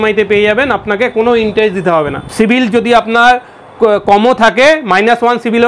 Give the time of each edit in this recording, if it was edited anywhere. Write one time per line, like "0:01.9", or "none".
0:02.2